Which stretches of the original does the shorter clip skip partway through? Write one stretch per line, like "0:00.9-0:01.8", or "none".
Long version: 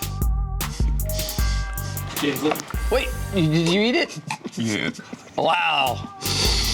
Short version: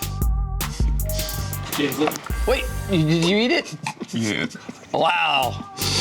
0:01.3-0:01.8